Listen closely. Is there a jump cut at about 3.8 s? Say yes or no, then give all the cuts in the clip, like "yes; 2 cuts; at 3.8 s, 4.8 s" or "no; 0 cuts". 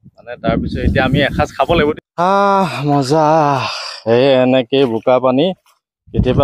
no; 1 cut; at 1.9 s